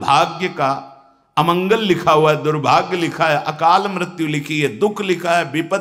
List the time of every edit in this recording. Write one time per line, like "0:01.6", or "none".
none